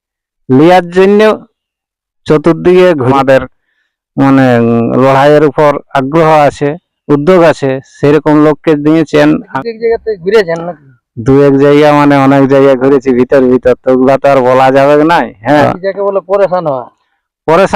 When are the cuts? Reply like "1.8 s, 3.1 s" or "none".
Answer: 3.1 s, 9.5 s, 15.6 s